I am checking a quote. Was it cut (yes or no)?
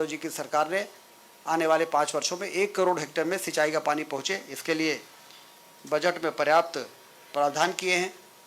no